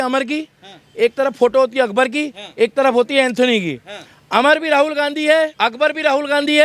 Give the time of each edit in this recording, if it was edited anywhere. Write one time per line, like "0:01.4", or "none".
0:05.5